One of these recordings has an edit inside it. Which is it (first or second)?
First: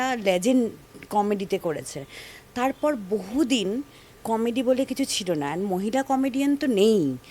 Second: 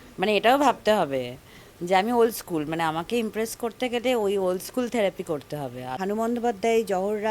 second